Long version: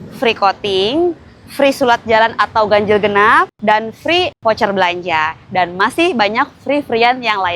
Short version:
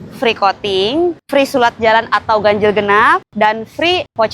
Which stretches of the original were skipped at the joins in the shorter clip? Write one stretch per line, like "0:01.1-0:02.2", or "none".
0:01.2-0:01.5